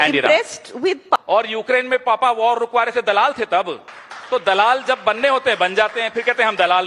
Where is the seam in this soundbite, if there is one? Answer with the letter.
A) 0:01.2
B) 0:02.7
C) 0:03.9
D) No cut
A